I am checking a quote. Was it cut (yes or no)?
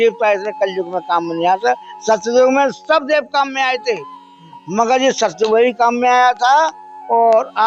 no